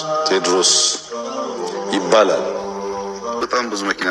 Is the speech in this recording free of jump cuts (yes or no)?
yes